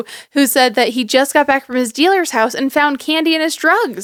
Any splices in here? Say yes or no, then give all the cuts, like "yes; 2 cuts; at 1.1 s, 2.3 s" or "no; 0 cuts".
no; 0 cuts